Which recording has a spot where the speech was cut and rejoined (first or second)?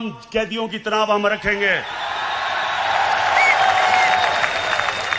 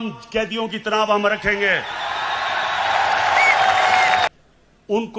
second